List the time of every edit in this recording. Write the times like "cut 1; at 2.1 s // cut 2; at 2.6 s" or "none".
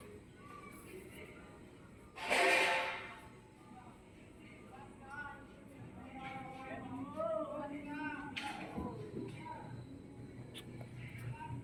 none